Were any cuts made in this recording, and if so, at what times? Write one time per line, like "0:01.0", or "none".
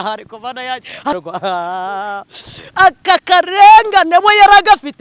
0:01.2